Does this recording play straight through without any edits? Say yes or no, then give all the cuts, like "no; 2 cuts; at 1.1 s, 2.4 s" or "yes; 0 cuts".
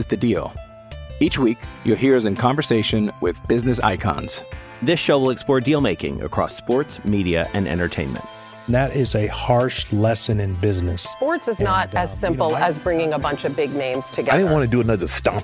yes; 0 cuts